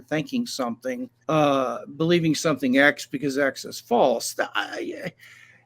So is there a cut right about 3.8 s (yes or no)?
no